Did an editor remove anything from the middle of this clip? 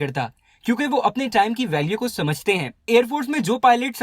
yes; 1 cut; at 2.9 s

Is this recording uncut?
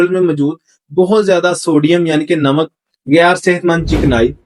yes; 0 cuts

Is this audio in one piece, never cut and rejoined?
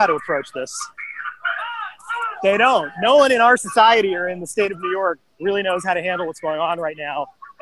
yes; 0 cuts

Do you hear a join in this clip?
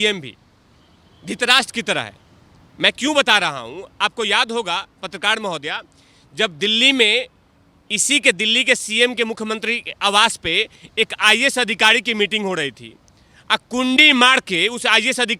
no; 0 cuts

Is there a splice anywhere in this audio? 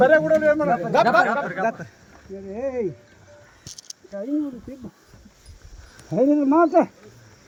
no; 0 cuts

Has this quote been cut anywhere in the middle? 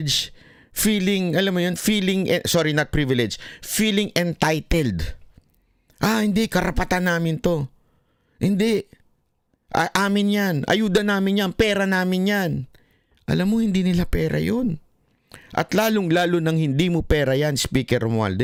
no; 0 cuts

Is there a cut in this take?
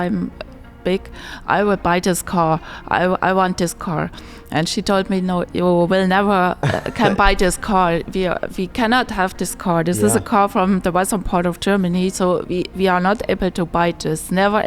no; 0 cuts

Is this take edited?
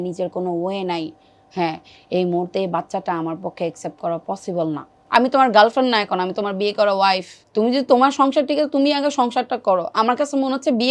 yes; 2 cuts; at 4.9 s, 7.4 s

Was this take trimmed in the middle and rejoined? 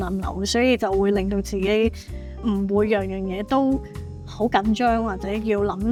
no; 0 cuts

